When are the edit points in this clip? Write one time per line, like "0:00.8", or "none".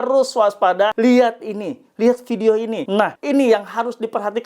0:00.9
0:03.0